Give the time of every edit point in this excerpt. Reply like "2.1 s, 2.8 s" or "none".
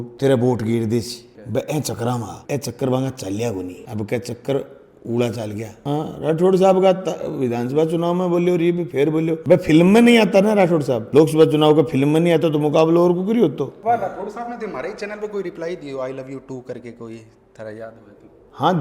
5.8 s, 13.7 s